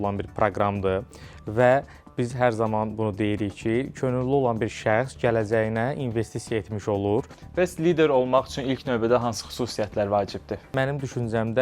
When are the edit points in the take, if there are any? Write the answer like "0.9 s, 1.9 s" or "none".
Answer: 7.4 s, 10.7 s